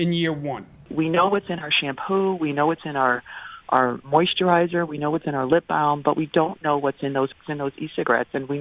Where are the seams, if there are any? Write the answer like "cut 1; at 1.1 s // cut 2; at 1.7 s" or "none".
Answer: cut 1; at 0.9 s // cut 2; at 7.4 s